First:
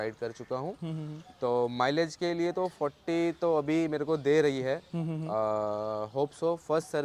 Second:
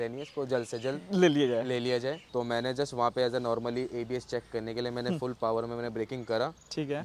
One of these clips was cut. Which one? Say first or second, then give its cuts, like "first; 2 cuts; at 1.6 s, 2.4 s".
second; 1 cut; at 2.2 s